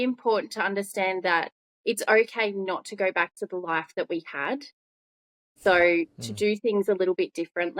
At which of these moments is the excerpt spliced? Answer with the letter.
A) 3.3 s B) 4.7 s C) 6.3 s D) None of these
D